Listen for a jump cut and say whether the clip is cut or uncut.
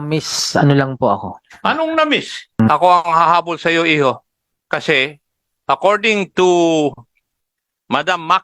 cut